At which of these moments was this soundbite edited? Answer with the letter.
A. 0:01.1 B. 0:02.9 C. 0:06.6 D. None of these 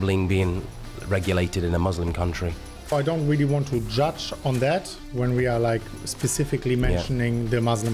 B